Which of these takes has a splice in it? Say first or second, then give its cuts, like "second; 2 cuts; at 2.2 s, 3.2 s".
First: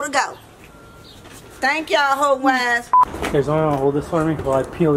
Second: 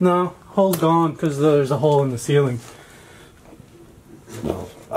first; 1 cut; at 3.0 s